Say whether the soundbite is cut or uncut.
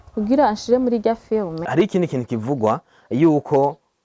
cut